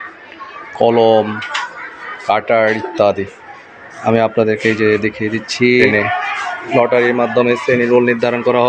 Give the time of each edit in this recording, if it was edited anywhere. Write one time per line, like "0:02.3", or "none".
0:05.9